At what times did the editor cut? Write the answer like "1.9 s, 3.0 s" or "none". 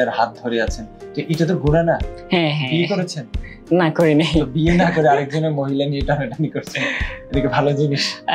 none